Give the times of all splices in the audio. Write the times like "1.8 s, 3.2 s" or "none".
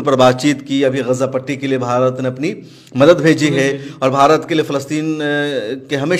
none